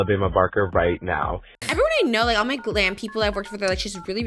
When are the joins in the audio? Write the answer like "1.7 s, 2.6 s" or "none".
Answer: 1.5 s